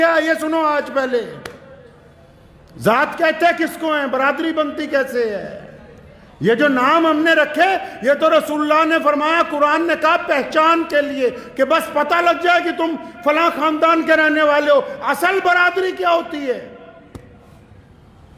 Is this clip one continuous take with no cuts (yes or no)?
yes